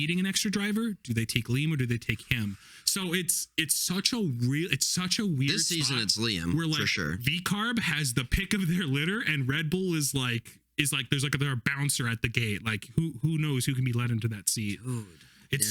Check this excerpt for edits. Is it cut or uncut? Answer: uncut